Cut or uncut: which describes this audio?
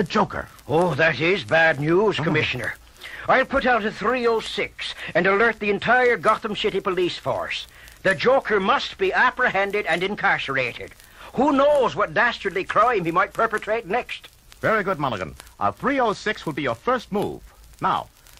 cut